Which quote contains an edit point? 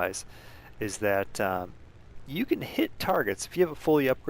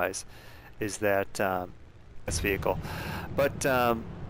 first; 1 cut; at 2.3 s

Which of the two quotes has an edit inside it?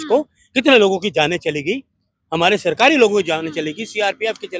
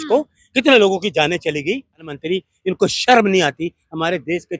second; 1 cut; at 2.1 s

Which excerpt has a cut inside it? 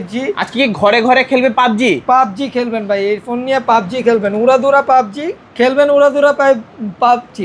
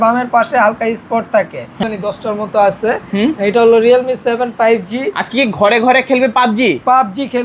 second; 1 cut; at 1.8 s

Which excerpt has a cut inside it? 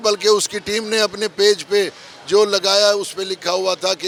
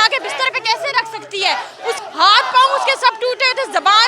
second; 1 cut; at 2.0 s

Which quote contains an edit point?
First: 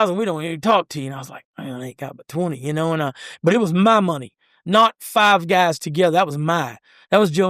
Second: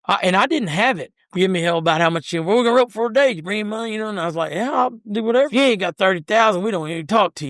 second; 2 cuts; at 1.1 s, 5.5 s

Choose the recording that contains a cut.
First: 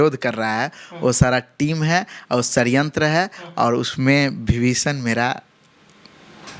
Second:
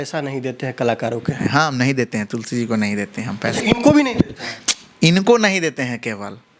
second; 2 cuts; at 1.4 s, 3.5 s

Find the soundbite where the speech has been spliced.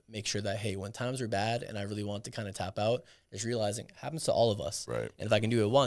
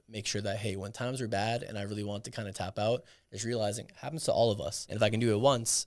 second; 1 cut; at 4.8 s

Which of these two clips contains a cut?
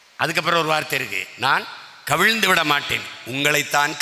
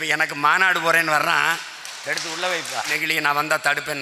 second; 1 cut; at 3.0 s

